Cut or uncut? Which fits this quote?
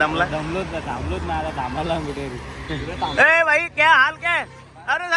uncut